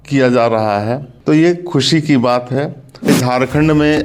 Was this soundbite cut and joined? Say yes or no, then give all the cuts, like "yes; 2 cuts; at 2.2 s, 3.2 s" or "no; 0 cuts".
yes; 2 cuts; at 1.1 s, 3.1 s